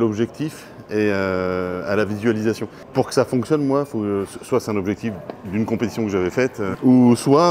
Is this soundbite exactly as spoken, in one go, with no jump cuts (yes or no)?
no